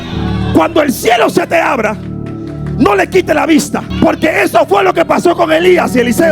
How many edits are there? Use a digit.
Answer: 1